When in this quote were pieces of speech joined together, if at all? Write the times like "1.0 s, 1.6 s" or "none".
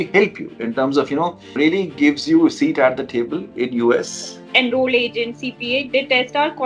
1.6 s, 4.4 s

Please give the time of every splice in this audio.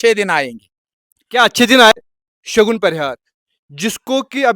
2.1 s

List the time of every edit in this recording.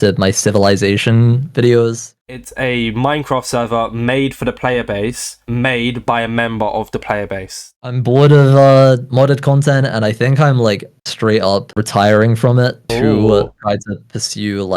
2.1 s, 7.8 s

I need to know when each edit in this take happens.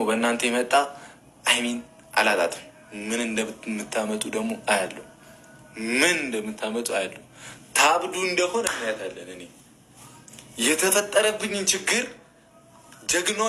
none

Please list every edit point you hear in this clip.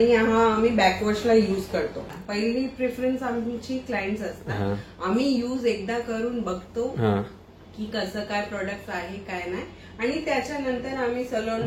2.1 s

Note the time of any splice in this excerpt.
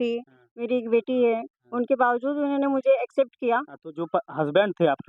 none

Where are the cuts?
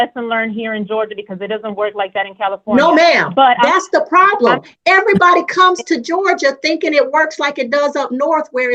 none

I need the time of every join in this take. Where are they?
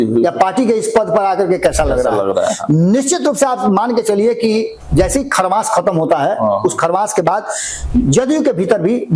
none

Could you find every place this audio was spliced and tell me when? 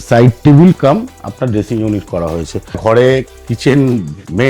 2.8 s

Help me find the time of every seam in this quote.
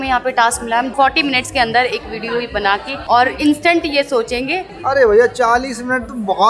0.9 s, 3.0 s

